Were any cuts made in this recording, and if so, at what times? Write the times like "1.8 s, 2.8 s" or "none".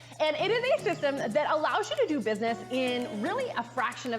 1.9 s